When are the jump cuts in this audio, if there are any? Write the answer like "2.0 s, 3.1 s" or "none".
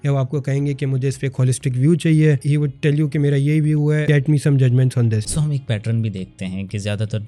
2.4 s, 4.0 s, 5.3 s